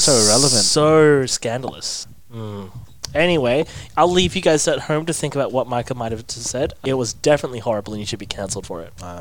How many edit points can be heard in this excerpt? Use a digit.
2